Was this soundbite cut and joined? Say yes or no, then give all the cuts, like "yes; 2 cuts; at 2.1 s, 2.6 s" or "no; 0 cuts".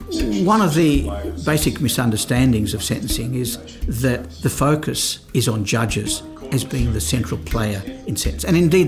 yes; 2 cuts; at 1.2 s, 5.1 s